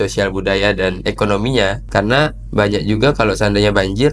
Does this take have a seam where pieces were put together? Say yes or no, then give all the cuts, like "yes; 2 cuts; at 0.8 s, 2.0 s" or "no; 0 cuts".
yes; 1 cut; at 1.8 s